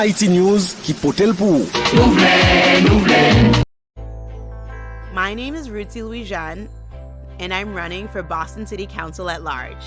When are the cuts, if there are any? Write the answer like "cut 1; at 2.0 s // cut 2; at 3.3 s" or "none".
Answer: cut 1; at 3.6 s